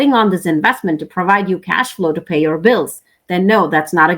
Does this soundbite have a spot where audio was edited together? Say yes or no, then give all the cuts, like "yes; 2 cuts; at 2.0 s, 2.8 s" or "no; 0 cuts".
no; 0 cuts